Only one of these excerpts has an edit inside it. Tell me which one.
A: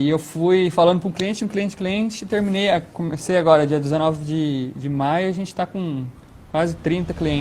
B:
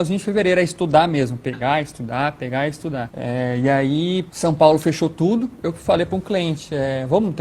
B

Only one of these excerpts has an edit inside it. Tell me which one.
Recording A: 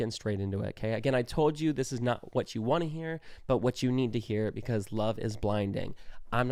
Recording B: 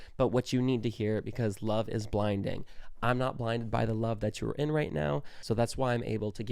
B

